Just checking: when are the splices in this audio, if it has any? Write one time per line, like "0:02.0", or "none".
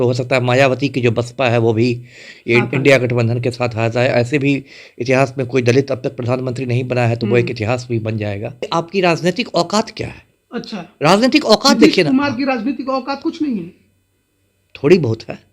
0:08.7